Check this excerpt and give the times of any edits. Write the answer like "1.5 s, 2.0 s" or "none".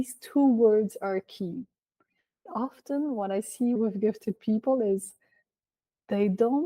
2.3 s, 3.8 s

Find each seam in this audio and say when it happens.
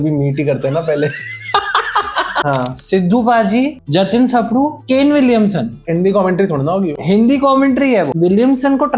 2.4 s, 4.8 s, 5.8 s, 8.1 s

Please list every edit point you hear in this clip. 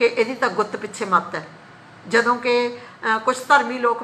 none

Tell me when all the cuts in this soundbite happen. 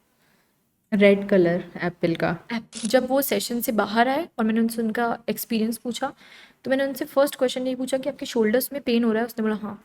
2.8 s

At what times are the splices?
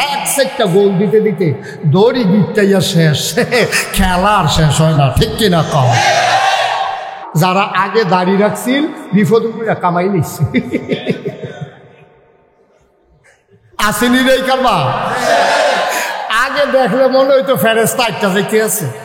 7.2 s

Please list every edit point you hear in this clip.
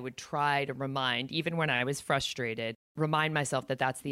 2.8 s

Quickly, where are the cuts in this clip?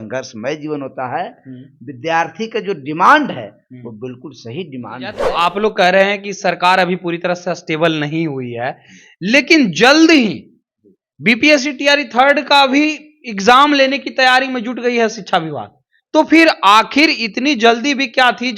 5.2 s

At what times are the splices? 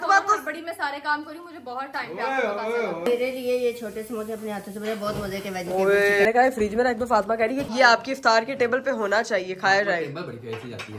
3.0 s, 6.2 s, 7.7 s

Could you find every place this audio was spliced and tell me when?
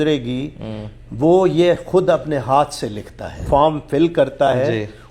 3.4 s

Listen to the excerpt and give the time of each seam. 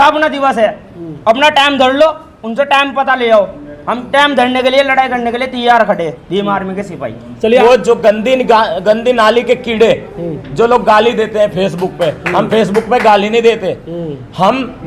7.6 s

